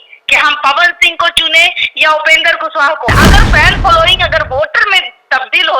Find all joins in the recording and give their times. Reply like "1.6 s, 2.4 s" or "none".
3.1 s

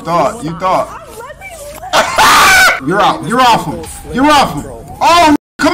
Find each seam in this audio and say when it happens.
2.8 s

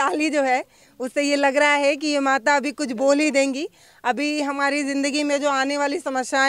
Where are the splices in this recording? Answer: none

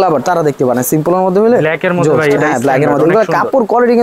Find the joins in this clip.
none

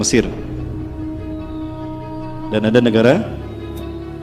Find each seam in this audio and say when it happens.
none

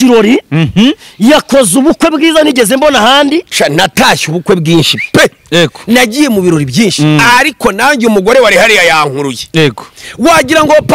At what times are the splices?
3.5 s

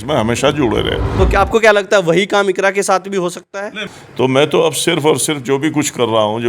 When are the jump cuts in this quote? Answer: 1.1 s, 3.8 s

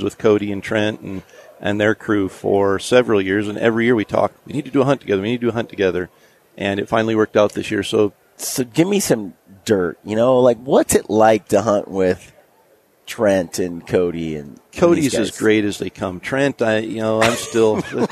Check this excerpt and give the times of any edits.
none

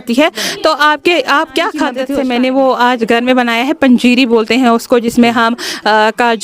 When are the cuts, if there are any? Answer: 2.0 s

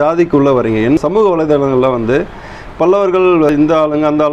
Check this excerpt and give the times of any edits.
1.0 s, 3.5 s

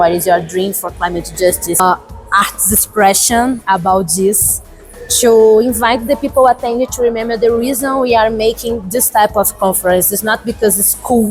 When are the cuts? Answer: 1.8 s

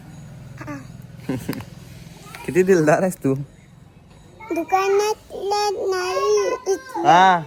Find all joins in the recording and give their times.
none

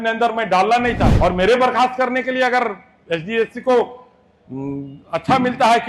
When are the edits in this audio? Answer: 1.1 s

